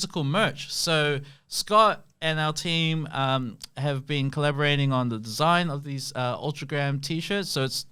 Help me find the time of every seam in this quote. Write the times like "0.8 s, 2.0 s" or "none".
none